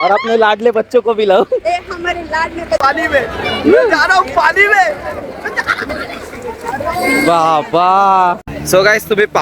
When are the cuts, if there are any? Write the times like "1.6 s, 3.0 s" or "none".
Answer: 2.8 s, 8.5 s